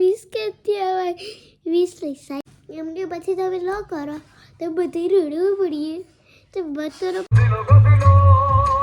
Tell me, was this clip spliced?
yes; 2 cuts; at 2.6 s, 7.3 s

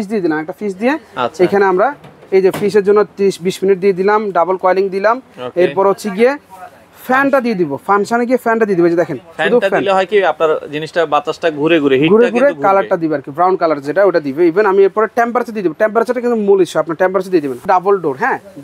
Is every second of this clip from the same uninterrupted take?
no; 1 cut; at 17.6 s

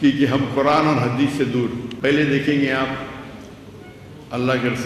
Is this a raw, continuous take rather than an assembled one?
no; 1 cut; at 1.9 s

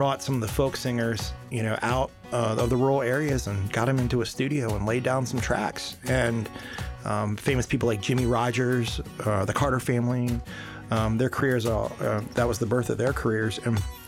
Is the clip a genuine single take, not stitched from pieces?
yes; 0 cuts

